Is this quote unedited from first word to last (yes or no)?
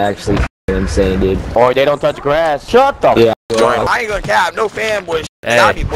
no